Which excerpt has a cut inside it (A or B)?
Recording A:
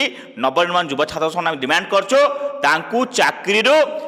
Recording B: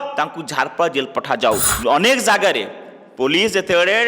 B